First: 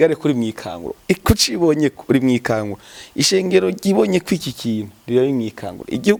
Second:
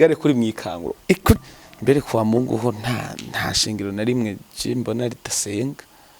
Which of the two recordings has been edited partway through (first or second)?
second